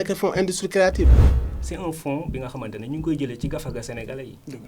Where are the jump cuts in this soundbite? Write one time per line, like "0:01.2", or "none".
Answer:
0:01.2